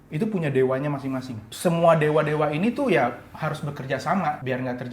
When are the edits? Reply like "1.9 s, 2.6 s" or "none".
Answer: 1.5 s